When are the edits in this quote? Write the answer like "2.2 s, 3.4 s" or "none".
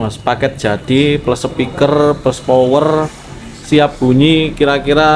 none